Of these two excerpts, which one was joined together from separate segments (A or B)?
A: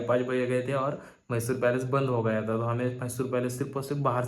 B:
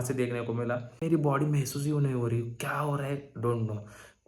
B